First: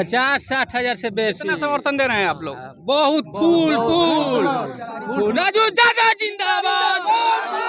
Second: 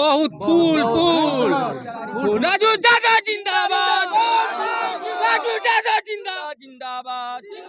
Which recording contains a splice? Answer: second; 1 cut; at 6.4 s

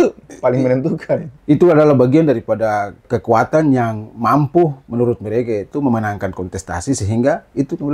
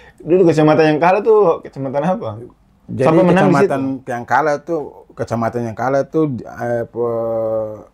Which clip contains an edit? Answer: first; 2 cuts; at 1.3 s, 3.0 s

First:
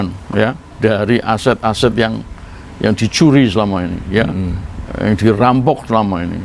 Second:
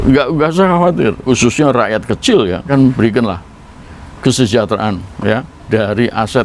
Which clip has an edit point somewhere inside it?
second; 2 cuts; at 1.2 s, 2.7 s

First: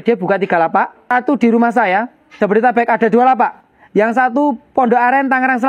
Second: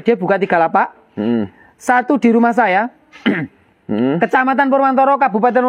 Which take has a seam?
first; 2 cuts; at 1.1 s, 2.4 s

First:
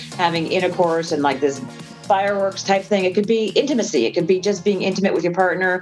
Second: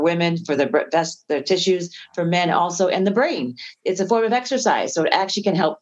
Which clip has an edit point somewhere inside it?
first; 1 cut; at 1.9 s

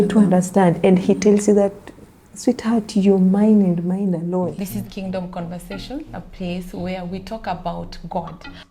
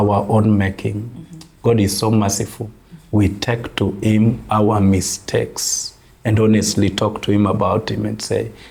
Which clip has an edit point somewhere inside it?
first; 1 cut; at 4.5 s

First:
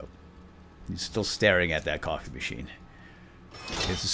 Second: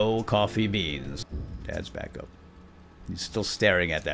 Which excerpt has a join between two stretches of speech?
second; 1 cut; at 1.1 s

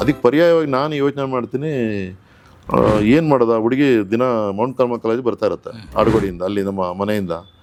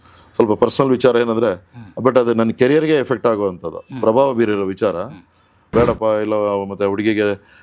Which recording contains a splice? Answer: second; 1 cut; at 5.6 s

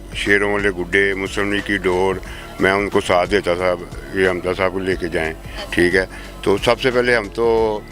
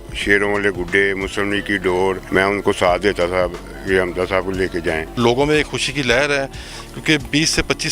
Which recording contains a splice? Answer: second; 2 cuts; at 2.2 s, 5.1 s

